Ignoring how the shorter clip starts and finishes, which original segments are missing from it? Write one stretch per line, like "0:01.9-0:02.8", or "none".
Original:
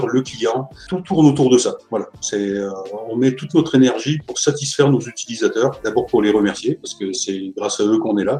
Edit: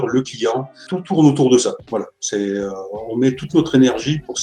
none